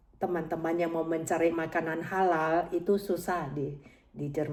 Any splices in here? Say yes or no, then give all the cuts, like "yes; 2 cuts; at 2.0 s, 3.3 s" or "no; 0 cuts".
no; 0 cuts